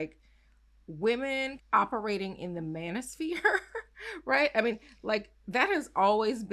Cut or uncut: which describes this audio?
cut